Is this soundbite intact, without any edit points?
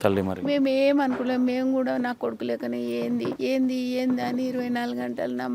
no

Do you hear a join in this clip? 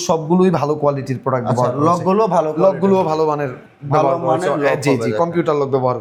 no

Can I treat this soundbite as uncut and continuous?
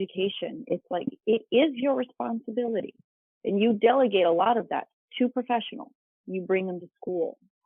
yes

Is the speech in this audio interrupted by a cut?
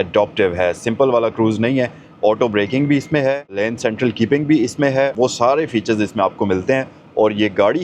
yes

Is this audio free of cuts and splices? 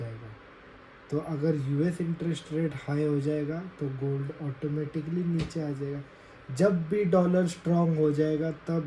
yes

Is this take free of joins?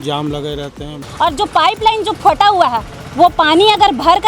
no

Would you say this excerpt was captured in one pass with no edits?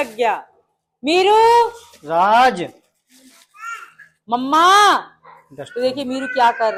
yes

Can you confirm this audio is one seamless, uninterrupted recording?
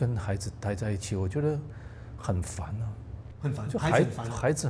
yes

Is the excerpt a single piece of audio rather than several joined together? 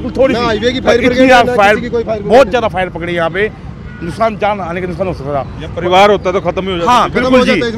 yes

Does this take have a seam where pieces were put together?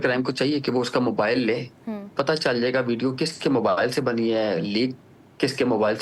yes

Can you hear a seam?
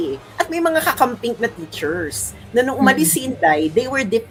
no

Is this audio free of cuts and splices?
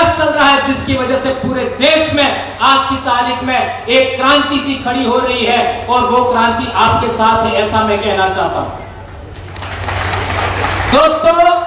yes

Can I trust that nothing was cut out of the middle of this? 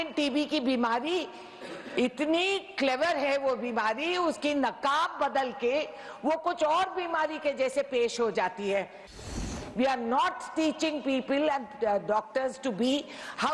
no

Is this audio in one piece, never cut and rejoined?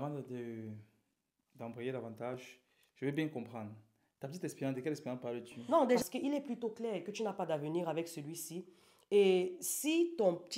no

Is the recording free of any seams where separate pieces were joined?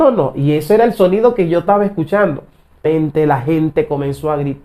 no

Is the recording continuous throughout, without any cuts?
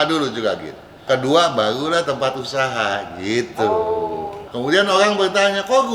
no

